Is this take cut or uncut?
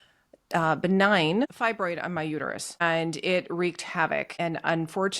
cut